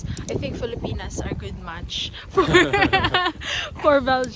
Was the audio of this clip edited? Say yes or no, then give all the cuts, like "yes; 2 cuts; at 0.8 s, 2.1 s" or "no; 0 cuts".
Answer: no; 0 cuts